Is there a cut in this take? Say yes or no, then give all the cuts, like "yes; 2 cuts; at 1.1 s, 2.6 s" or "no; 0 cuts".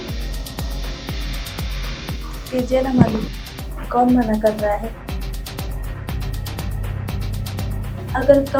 no; 0 cuts